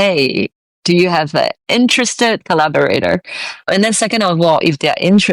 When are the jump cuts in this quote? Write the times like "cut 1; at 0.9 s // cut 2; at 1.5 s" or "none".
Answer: cut 1; at 2.4 s